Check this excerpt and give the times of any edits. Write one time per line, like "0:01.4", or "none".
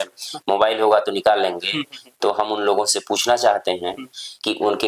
none